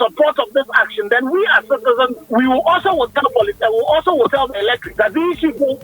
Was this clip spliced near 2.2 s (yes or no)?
yes